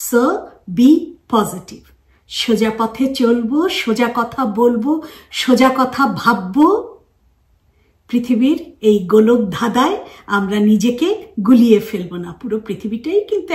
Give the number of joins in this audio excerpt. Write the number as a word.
zero